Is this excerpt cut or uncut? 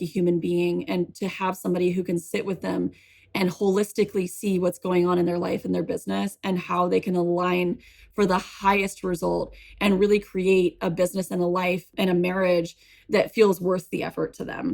cut